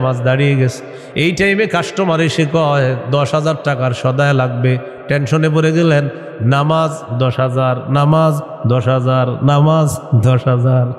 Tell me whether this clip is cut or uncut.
uncut